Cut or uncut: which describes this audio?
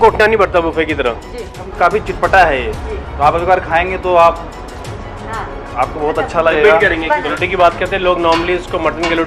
cut